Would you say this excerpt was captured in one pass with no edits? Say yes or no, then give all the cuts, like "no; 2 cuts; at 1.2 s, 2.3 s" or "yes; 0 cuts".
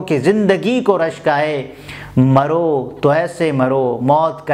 yes; 0 cuts